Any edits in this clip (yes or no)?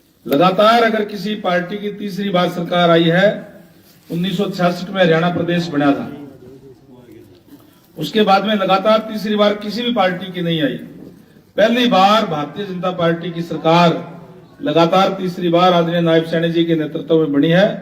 no